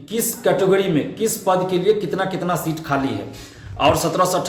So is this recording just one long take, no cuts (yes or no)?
yes